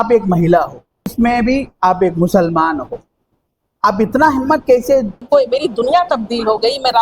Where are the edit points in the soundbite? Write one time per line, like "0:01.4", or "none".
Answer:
0:01.1
0:05.2